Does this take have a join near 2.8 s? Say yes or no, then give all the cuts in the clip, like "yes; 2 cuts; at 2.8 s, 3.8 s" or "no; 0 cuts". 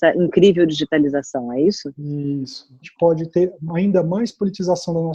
yes; 1 cut; at 2.8 s